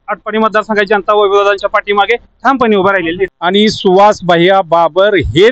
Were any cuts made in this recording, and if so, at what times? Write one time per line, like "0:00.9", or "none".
0:03.4